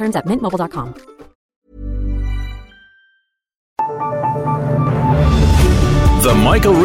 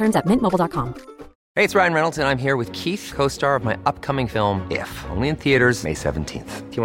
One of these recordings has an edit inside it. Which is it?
first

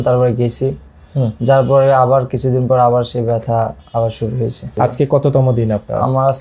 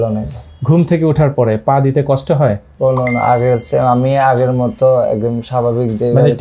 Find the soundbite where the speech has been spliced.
first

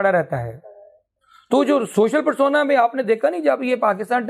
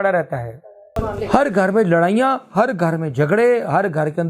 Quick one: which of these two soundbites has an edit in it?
second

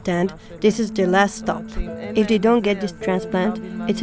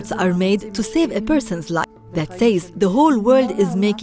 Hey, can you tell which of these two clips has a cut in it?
second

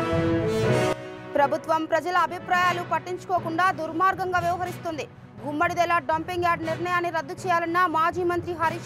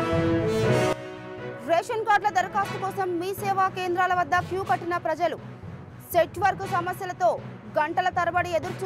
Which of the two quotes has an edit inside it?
second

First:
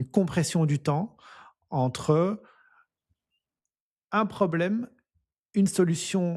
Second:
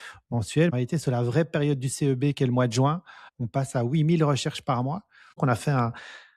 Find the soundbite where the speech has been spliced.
second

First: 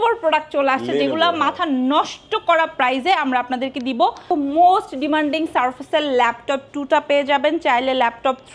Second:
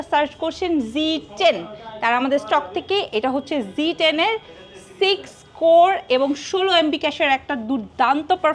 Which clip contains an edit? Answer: first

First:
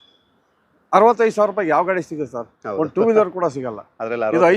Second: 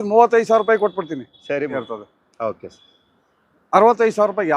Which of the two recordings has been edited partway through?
second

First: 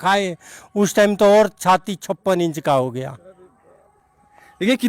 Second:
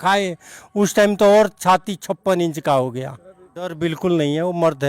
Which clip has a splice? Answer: second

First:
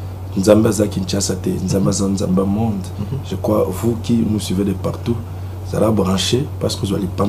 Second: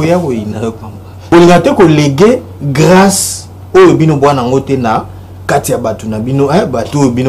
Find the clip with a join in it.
second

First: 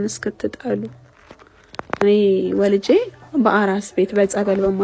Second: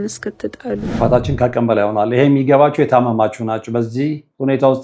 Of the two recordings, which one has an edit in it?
second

